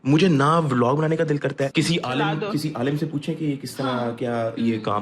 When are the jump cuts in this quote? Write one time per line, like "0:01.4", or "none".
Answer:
0:01.7